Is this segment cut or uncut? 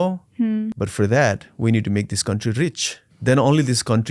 cut